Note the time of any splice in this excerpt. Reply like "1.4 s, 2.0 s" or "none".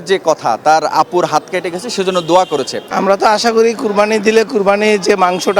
2.8 s